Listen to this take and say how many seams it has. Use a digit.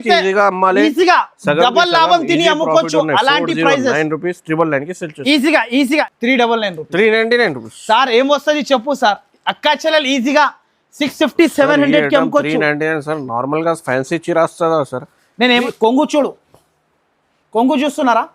2